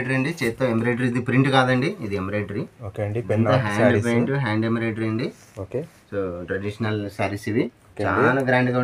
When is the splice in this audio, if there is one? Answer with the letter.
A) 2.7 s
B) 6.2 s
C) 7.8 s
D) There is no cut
C